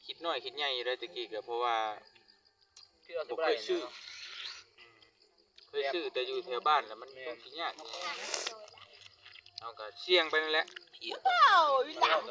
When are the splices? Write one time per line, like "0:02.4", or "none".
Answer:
none